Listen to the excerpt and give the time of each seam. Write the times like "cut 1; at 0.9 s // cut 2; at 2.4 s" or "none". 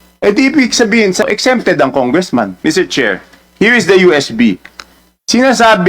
cut 1; at 1.2 s // cut 2; at 2.5 s